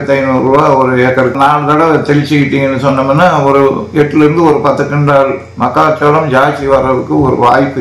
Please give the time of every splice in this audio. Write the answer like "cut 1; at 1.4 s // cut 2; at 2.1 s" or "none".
cut 1; at 1.3 s